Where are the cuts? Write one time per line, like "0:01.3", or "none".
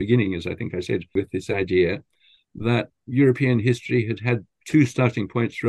0:01.1
0:02.9
0:04.5